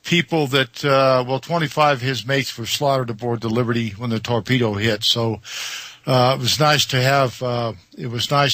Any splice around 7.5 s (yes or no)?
no